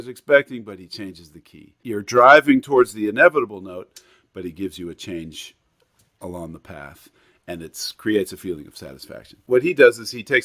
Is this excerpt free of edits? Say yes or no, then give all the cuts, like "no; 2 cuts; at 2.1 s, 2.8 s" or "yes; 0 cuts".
no; 2 cuts; at 1.8 s, 9.4 s